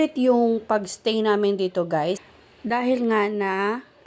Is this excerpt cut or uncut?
uncut